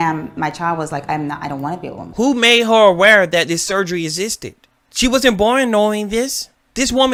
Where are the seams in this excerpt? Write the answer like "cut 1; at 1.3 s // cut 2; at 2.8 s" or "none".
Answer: none